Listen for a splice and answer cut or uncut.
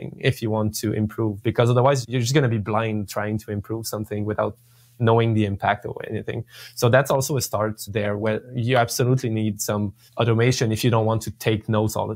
cut